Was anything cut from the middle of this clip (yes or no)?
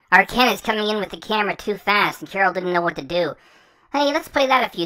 no